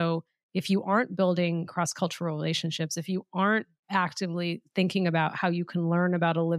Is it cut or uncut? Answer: uncut